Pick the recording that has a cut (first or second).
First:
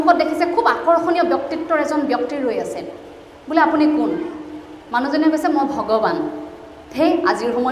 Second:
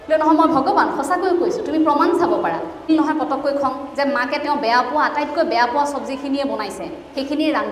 second